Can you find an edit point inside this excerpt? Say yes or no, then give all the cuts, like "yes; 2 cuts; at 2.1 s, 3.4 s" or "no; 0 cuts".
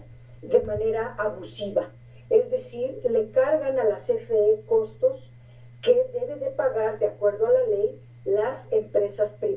no; 0 cuts